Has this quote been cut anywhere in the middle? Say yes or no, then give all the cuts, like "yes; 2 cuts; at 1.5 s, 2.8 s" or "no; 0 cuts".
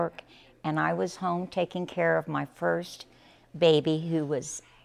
no; 0 cuts